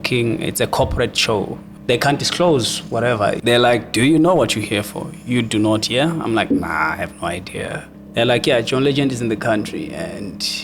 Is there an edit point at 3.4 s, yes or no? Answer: yes